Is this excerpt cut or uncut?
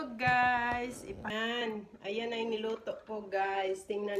cut